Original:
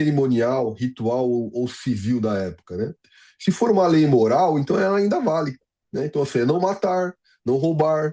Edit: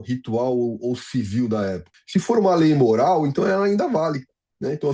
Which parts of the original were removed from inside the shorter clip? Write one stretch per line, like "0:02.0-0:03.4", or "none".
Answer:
0:02.6-0:03.2